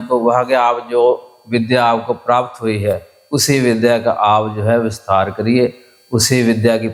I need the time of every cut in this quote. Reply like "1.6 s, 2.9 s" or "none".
none